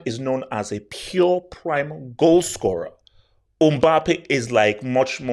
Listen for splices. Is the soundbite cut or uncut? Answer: uncut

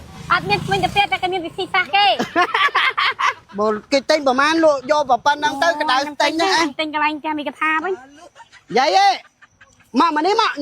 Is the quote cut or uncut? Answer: cut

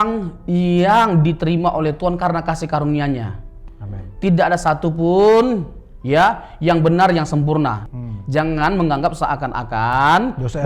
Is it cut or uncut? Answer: cut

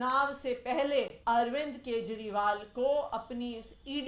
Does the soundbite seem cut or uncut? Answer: cut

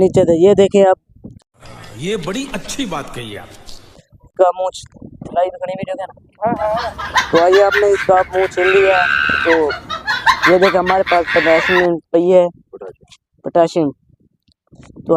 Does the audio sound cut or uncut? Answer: cut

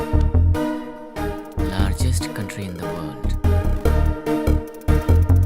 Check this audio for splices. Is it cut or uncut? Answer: cut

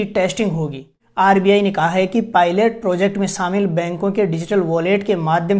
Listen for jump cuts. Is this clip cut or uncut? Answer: cut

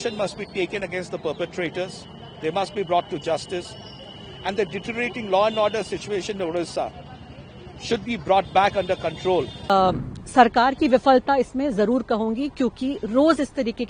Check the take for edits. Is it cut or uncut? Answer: cut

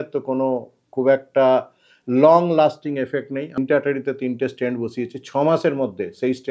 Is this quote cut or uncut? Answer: cut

